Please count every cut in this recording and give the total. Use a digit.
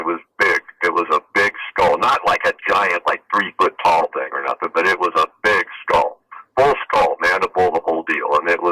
0